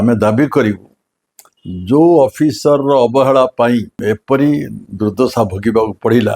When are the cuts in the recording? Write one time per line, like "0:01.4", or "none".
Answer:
0:03.9